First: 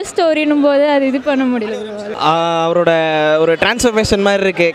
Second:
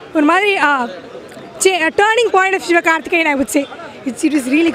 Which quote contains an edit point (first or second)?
first